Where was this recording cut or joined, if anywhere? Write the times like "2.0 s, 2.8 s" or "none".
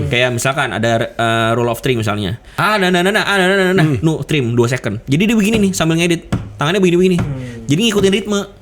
2.5 s